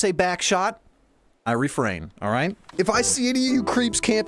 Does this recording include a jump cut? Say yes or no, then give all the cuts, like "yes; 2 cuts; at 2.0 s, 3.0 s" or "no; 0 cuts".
yes; 1 cut; at 2.6 s